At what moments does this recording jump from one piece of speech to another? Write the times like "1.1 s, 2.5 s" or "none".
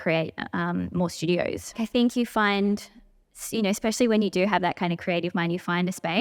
1.8 s

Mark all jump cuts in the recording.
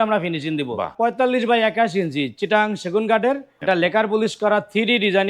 0.9 s, 3.5 s

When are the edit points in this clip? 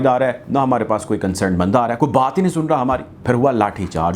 3.1 s

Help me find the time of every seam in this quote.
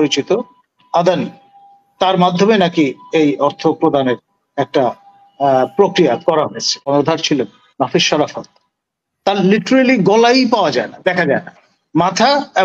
6.9 s

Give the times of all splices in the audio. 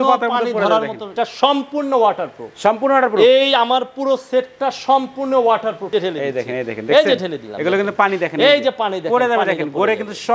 1.1 s, 5.9 s

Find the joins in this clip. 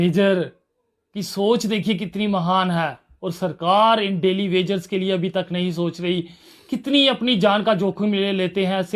none

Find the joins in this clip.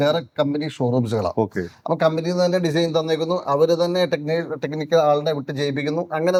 none

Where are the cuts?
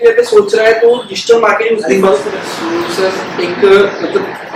2.2 s

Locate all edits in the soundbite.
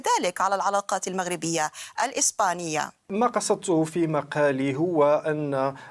3.1 s

